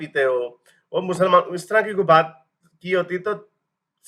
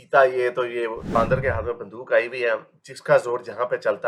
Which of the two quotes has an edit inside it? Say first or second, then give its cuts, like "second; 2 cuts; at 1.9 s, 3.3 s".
second; 1 cut; at 1.1 s